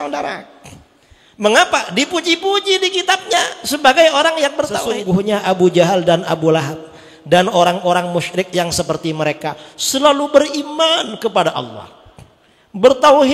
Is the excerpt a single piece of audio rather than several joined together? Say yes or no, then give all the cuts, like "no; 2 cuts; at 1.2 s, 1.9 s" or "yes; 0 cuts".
no; 1 cut; at 5.0 s